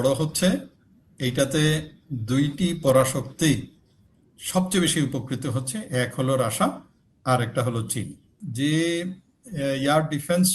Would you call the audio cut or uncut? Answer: cut